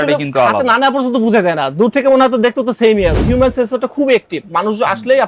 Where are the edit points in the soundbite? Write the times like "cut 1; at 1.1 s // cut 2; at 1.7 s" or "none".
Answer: cut 1; at 3.2 s